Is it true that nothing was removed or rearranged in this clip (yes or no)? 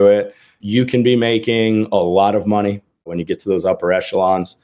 no